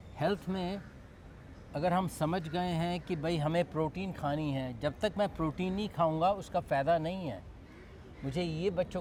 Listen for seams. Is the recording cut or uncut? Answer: uncut